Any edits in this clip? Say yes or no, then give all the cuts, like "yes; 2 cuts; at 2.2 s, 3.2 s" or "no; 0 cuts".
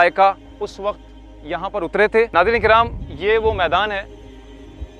yes; 1 cut; at 2.3 s